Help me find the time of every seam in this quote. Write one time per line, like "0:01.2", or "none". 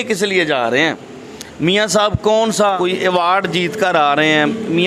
0:02.8